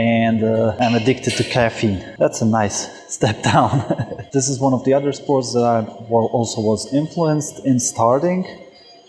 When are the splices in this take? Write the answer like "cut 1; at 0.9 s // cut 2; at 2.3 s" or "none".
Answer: none